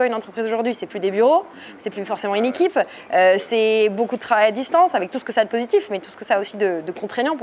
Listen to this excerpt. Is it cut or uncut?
uncut